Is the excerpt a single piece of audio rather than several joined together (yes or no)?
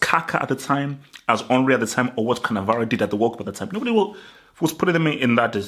yes